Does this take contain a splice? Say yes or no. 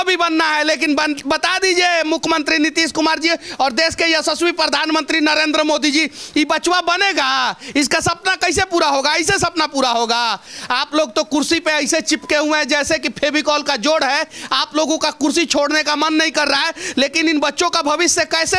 no